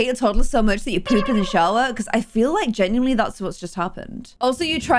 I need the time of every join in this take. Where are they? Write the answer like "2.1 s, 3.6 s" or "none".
none